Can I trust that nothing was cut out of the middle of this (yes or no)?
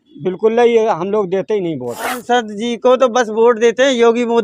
no